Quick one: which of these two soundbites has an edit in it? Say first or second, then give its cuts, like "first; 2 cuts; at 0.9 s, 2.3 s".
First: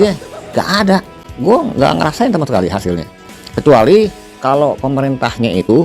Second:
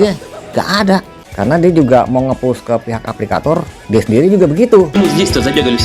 second; 2 cuts; at 1.2 s, 4.9 s